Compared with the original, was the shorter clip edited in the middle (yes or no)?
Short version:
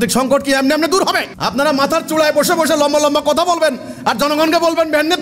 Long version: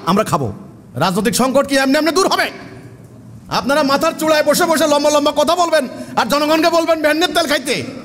yes